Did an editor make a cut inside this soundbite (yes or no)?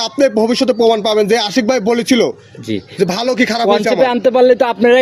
no